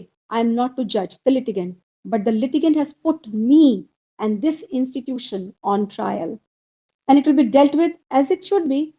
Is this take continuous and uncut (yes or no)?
yes